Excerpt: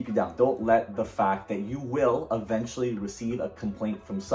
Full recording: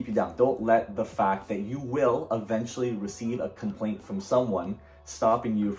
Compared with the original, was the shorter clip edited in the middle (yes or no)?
no